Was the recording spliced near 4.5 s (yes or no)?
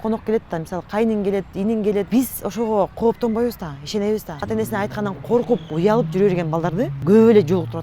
yes